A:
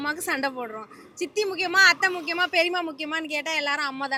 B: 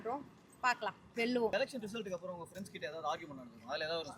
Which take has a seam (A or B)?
B